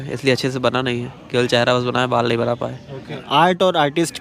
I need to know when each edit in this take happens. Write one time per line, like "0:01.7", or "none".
0:03.2